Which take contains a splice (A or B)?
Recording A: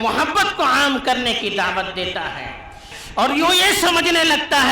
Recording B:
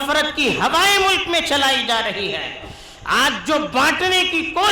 A